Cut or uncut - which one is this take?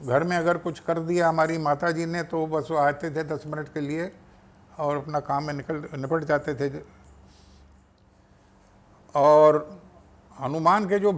cut